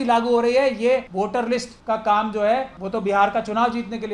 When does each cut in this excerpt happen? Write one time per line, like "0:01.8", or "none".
0:01.4
0:02.8